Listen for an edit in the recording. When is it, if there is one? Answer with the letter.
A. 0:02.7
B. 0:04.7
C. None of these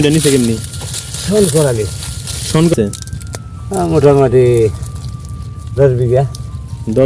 A